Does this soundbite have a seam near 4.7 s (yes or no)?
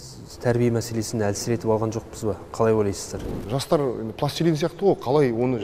no